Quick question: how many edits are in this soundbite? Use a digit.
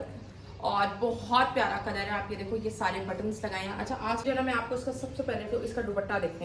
1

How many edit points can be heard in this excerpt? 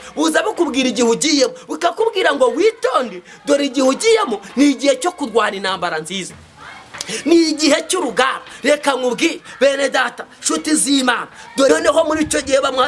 1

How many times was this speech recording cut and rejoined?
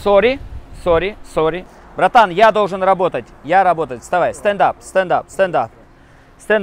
1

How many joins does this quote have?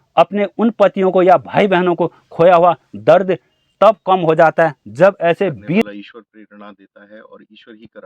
1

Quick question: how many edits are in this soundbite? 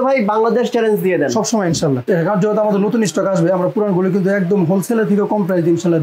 1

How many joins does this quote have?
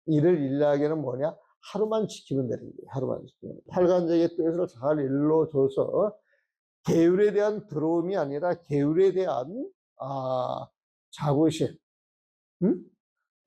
1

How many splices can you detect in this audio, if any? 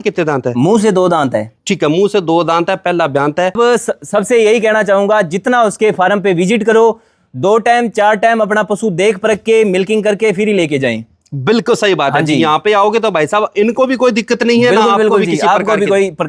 1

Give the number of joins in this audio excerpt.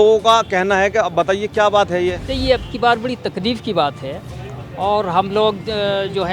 1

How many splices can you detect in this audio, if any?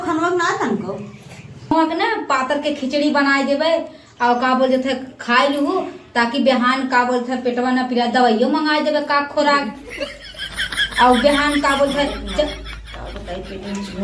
1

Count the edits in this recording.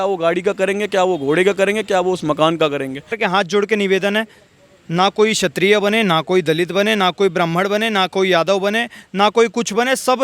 1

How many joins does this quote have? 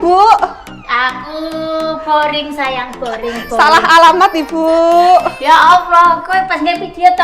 0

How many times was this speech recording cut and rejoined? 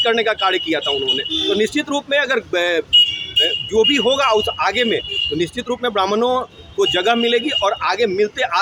0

